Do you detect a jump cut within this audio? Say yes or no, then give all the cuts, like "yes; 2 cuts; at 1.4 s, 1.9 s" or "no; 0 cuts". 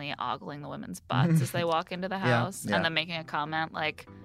no; 0 cuts